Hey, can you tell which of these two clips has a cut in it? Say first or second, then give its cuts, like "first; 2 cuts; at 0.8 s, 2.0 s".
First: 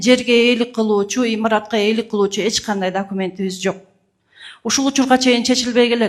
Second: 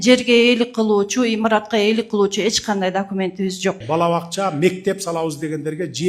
second; 1 cut; at 3.8 s